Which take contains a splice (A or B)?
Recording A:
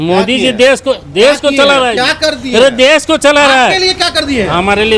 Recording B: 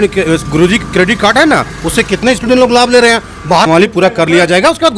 B